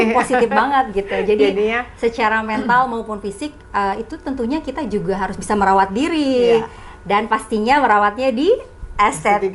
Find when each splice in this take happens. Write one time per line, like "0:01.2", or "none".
none